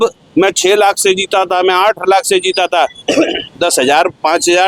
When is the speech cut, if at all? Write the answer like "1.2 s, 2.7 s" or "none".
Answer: none